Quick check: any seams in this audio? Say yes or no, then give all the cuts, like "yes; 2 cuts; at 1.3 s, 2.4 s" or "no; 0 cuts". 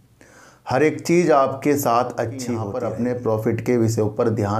yes; 1 cut; at 2.7 s